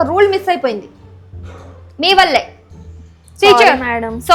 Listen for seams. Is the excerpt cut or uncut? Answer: uncut